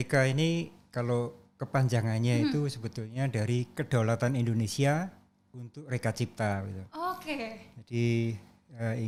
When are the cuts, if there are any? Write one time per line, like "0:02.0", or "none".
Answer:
none